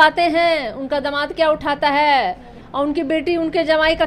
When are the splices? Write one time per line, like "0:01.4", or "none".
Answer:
none